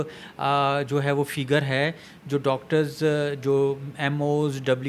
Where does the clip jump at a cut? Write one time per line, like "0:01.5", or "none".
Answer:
none